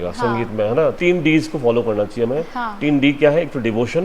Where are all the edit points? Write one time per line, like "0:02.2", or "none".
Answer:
0:00.9